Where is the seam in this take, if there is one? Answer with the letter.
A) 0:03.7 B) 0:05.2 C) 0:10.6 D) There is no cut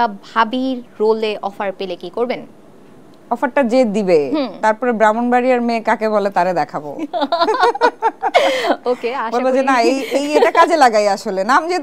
D